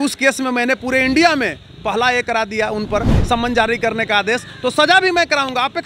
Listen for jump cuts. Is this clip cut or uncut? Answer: uncut